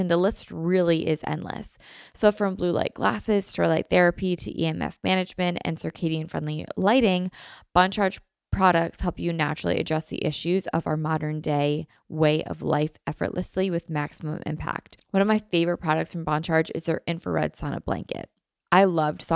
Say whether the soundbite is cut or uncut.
uncut